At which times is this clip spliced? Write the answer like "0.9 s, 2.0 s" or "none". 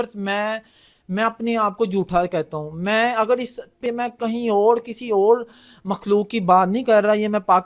3.8 s